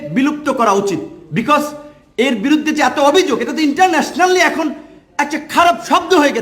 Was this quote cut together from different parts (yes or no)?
no